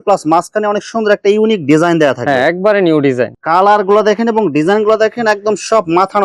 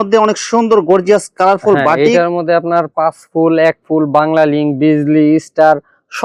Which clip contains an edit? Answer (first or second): first